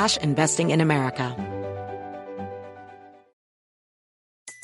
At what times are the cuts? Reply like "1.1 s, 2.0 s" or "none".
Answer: 1.3 s